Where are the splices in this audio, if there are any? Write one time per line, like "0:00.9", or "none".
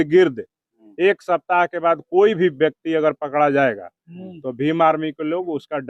none